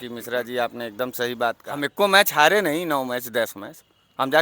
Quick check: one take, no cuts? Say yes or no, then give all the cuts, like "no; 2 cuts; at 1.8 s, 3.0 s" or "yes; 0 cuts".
no; 1 cut; at 1.6 s